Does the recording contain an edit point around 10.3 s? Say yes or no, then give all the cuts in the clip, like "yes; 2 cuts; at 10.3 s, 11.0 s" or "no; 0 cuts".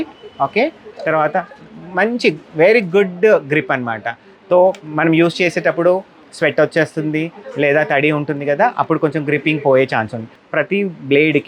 yes; 1 cut; at 10.3 s